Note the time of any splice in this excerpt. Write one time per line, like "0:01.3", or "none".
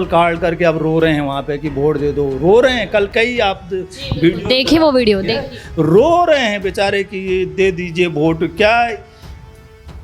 none